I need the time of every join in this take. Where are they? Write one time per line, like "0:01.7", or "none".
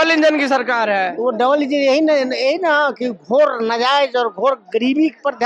none